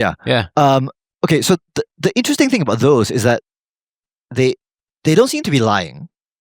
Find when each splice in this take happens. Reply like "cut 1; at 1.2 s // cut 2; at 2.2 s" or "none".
none